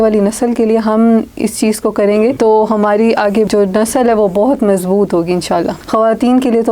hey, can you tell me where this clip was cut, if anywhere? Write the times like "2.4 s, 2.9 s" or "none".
2.4 s, 3.5 s, 5.8 s

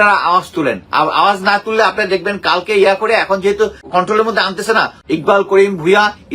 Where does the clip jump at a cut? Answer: 3.8 s, 5.0 s

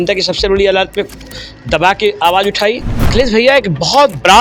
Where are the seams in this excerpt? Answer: 3.1 s

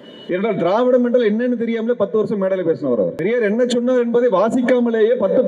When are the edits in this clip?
3.2 s

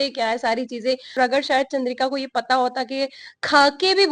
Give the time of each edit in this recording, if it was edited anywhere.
1.2 s

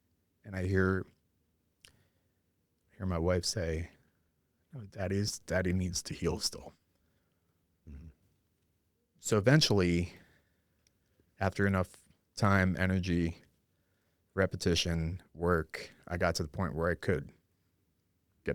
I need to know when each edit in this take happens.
8.2 s

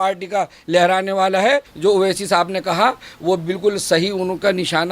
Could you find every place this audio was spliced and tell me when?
1.7 s

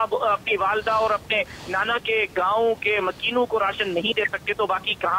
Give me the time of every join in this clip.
none

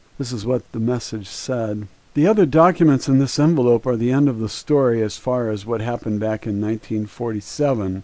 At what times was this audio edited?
6.9 s

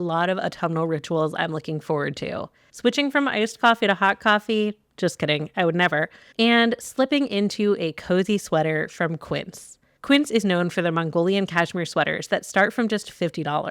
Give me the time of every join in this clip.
2.7 s

